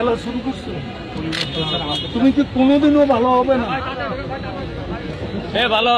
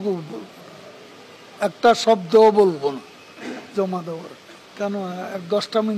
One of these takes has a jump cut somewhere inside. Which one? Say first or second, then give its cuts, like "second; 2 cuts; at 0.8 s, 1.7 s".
second; 1 cut; at 4.7 s